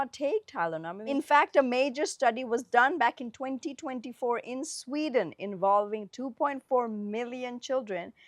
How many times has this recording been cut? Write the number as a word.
one